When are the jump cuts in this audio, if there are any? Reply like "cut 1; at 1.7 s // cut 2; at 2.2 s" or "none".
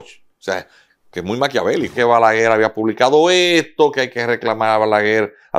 cut 1; at 1.9 s